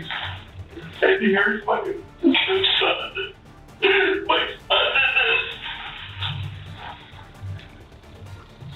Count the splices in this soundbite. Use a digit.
0